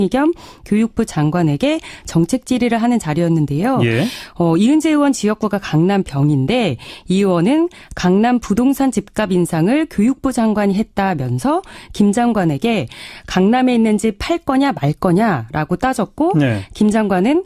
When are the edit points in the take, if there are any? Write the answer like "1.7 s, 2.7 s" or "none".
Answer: 1.7 s